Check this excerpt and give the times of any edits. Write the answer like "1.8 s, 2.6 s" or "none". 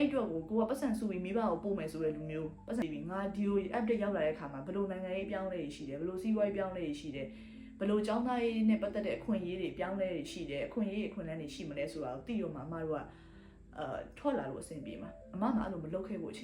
2.8 s